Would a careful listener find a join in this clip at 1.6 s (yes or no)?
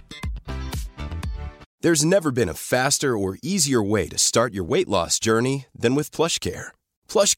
yes